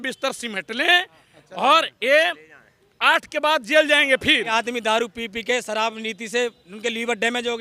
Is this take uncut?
no; 1 cut; at 4.5 s

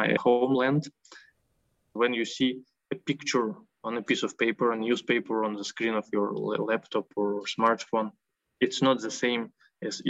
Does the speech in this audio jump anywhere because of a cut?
yes; 1 cut; at 1.5 s

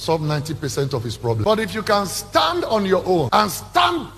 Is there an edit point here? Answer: yes; 1 cut; at 1.4 s

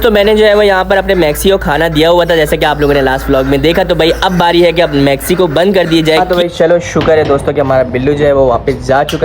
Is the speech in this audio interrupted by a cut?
yes; 1 cut; at 6.2 s

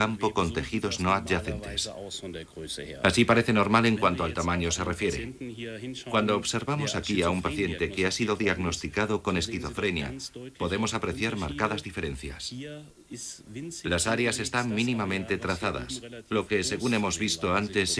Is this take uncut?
yes; 0 cuts

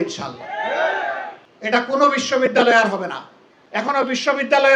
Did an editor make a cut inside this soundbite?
yes; 2 cuts; at 1.4 s, 3.9 s

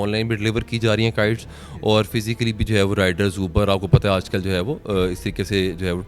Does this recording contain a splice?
no; 0 cuts

